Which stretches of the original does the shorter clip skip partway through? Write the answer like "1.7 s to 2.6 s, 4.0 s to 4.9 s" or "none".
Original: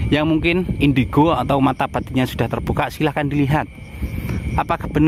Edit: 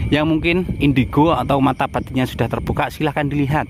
none

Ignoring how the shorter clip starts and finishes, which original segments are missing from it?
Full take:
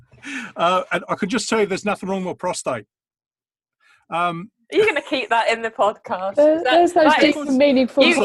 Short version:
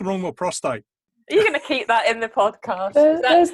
3.1 s to 4.5 s

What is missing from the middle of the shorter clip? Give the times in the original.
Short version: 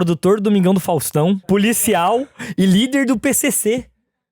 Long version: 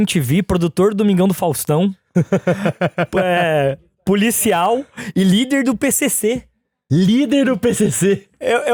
2.0 s to 4.0 s

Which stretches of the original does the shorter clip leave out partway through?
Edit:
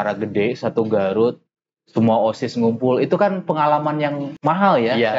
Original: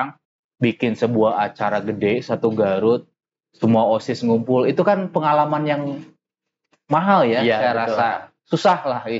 5.9 s to 6.7 s

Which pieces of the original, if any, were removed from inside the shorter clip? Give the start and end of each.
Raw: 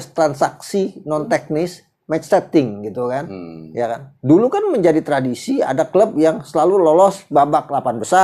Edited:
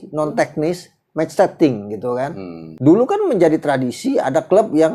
3.6 s to 4.1 s

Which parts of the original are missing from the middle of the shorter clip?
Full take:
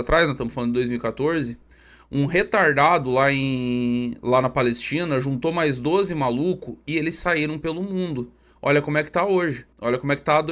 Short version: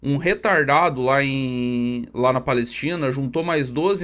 none

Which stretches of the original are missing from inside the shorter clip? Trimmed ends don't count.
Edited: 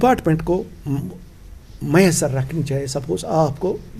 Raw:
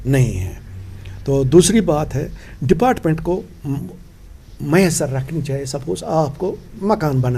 none

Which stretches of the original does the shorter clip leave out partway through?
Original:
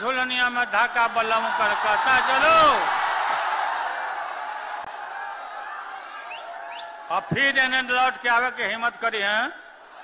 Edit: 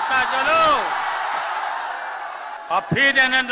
4.5 s to 7.0 s

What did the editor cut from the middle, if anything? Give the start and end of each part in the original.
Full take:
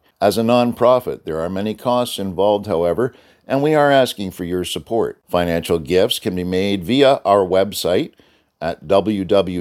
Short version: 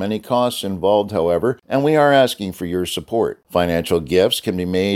3.2 s to 3.4 s

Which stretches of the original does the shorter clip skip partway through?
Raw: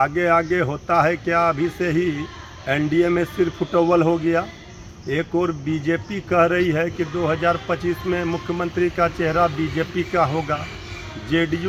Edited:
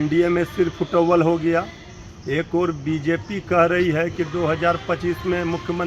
none

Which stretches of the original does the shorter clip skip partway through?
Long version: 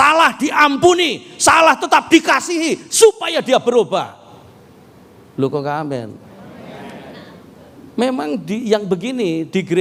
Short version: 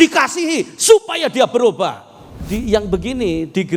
4.6 s to 8.4 s

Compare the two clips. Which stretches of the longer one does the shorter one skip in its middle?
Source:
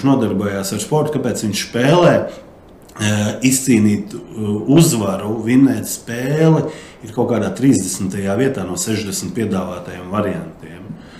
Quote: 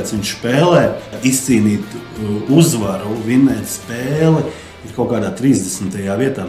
2.5 s to 3.3 s

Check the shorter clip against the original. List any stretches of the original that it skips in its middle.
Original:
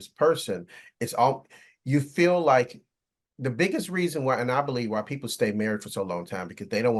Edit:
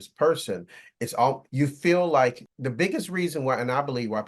1.5 s to 1.8 s, 2.8 s to 3.3 s

